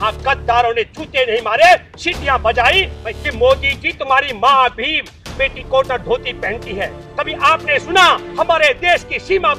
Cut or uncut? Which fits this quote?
cut